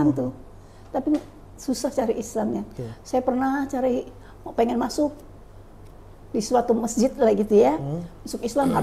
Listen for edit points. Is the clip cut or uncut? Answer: uncut